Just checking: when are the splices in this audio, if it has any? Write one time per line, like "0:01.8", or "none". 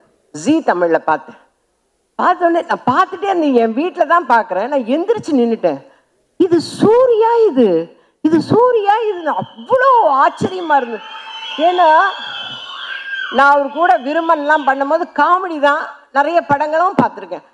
none

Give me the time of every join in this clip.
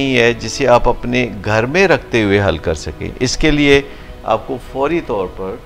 none

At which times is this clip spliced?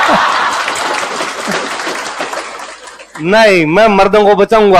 none

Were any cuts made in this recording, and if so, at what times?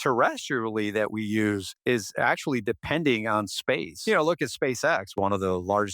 0:01.7
0:03.9
0:05.1

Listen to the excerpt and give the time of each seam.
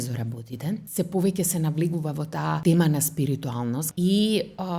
0:00.9
0:02.6
0:03.9

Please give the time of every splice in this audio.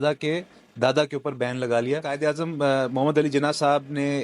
0:02.1

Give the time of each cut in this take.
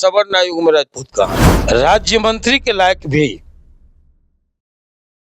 0:01.5

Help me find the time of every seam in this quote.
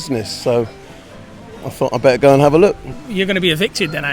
0:03.0

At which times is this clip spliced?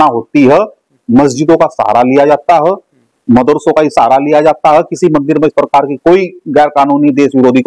none

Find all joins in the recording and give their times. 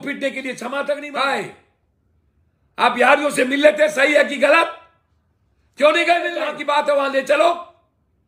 0:01.1
0:06.5

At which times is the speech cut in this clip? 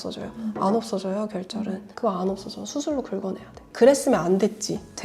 0:01.9
0:03.7

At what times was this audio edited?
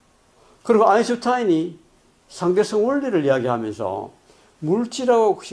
none

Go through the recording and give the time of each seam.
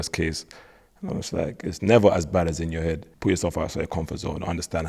0:03.1
0:03.9

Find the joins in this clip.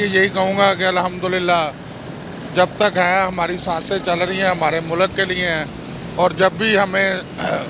none

